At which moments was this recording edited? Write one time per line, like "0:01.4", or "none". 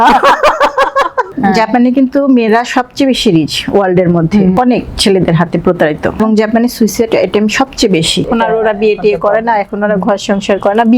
0:01.3
0:04.5
0:06.2
0:08.3